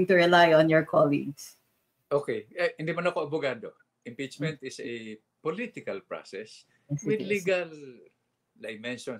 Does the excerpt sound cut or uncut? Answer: uncut